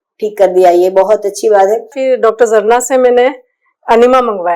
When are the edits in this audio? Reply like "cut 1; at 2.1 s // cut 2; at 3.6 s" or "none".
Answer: cut 1; at 1.9 s